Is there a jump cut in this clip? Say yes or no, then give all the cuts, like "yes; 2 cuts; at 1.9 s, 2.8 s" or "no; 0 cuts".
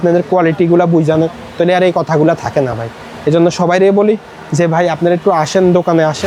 no; 0 cuts